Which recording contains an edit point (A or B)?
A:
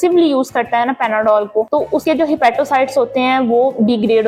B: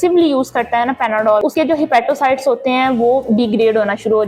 B